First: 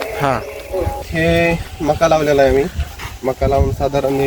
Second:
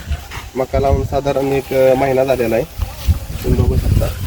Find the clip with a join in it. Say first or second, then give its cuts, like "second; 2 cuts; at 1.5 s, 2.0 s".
first; 1 cut; at 1.0 s